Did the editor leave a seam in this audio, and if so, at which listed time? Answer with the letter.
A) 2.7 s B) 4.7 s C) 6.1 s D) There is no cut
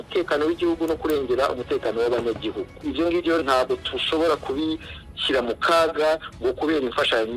A